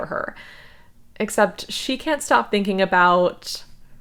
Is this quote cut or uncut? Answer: uncut